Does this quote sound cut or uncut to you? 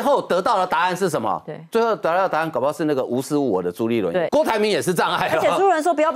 cut